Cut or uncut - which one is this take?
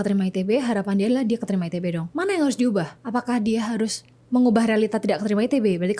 cut